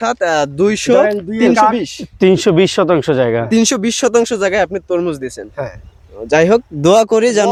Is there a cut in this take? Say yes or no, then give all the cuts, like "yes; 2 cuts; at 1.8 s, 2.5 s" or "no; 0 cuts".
no; 0 cuts